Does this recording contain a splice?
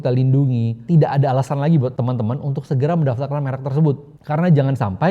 yes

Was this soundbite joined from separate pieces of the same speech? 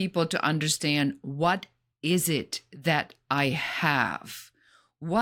no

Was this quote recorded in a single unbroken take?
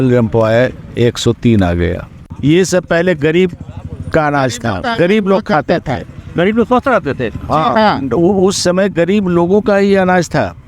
no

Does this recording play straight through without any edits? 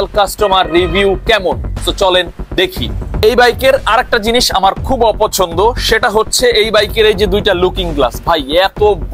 no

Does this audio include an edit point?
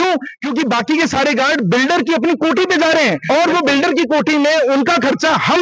yes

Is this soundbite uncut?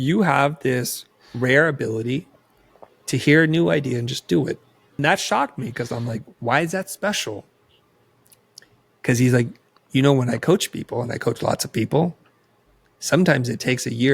no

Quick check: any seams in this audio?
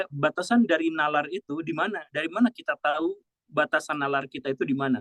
no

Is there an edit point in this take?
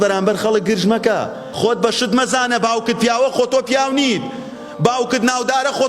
yes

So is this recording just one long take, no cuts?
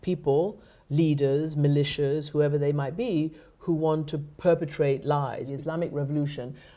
no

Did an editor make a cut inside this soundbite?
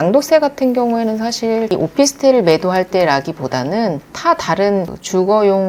yes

